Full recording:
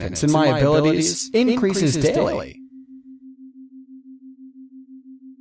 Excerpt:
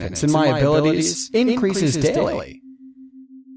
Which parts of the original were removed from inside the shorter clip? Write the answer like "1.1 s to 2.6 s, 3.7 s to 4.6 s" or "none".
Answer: 2.5 s to 3.6 s